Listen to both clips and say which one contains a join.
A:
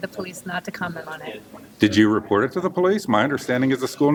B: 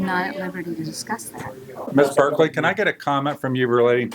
B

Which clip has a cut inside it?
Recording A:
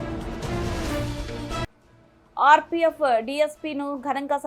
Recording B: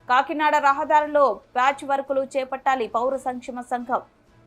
A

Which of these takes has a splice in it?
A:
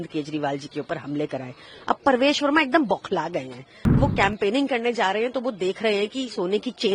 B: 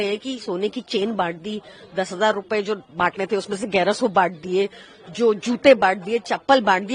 A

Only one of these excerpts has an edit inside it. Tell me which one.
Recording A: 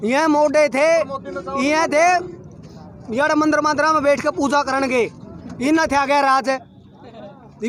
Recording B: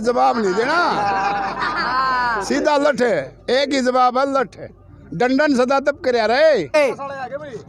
B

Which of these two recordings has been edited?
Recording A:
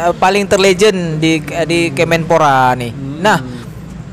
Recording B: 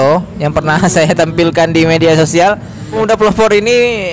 B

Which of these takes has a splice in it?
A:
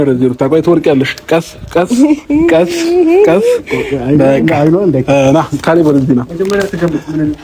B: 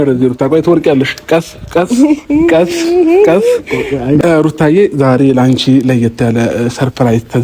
B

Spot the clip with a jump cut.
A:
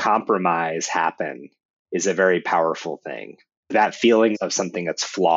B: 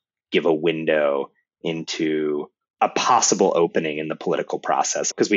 A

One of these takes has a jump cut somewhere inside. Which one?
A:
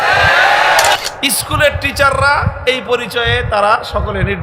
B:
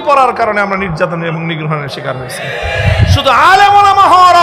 A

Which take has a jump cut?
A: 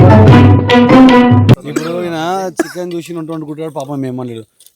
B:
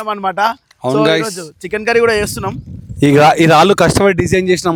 A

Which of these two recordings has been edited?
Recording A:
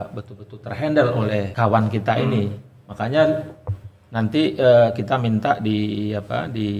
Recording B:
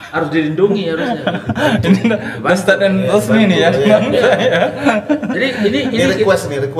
A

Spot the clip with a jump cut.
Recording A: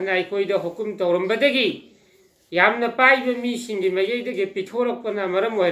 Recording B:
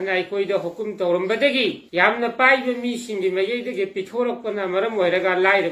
B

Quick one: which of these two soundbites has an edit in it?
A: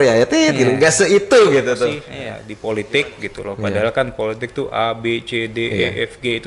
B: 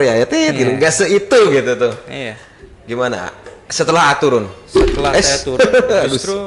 A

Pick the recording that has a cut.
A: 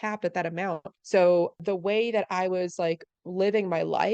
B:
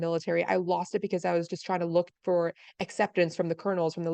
A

